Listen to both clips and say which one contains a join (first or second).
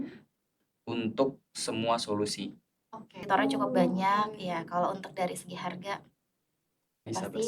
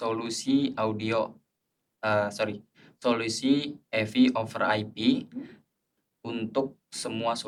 first